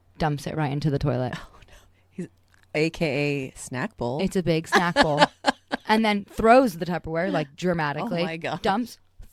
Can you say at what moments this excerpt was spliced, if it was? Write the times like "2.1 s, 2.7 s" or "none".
none

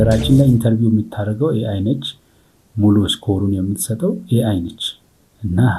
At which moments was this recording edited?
none

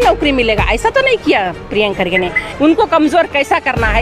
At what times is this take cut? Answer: 2.4 s

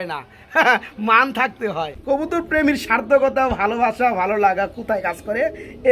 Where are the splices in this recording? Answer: 1.9 s

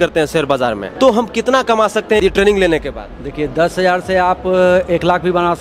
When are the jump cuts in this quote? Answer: 0.8 s, 2.2 s

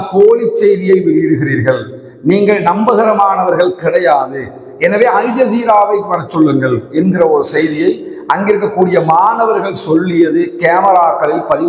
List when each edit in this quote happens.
none

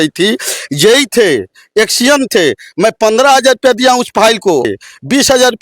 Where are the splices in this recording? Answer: 4.7 s

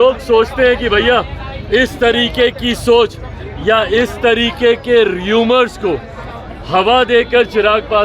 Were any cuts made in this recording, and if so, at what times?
none

